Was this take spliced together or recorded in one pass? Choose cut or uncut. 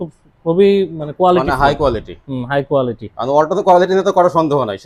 uncut